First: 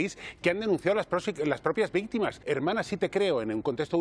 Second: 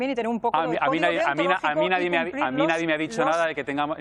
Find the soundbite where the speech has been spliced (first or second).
first